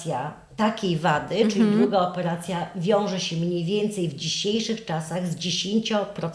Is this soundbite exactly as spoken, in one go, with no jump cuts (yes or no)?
yes